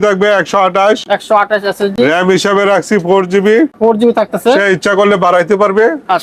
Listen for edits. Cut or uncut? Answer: uncut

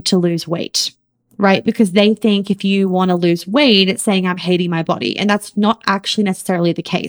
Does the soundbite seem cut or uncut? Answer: uncut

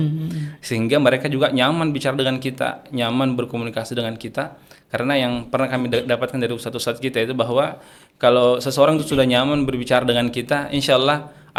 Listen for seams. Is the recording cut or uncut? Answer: uncut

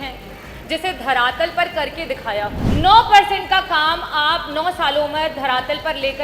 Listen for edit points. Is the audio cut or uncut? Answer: cut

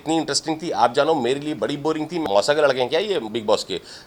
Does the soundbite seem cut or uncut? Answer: cut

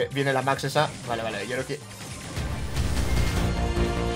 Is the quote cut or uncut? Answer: uncut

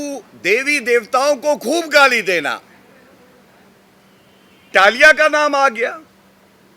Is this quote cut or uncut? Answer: cut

